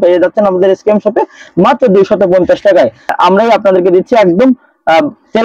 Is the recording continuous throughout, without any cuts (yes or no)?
no